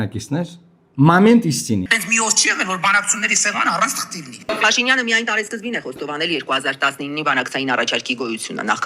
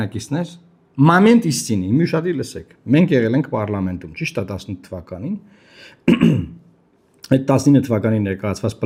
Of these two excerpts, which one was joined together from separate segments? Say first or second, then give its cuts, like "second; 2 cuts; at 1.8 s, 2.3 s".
first; 2 cuts; at 1.8 s, 4.5 s